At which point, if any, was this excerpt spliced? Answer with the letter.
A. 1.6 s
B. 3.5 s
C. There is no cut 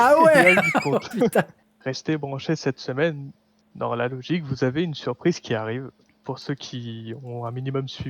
A